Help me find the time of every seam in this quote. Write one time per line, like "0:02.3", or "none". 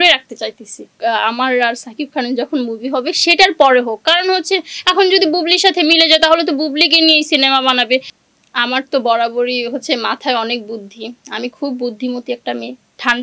0:00.9
0:08.1